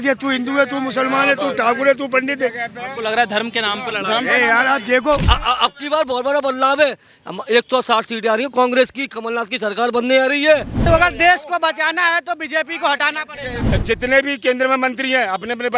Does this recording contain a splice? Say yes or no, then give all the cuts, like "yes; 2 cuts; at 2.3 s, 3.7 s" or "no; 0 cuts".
yes; 3 cuts; at 5.2 s, 10.8 s, 13.6 s